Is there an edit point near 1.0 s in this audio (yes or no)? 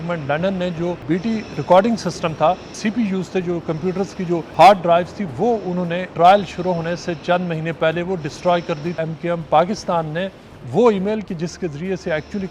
yes